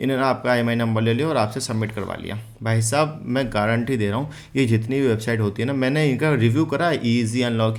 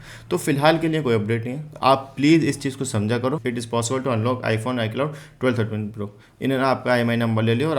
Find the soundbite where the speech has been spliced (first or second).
second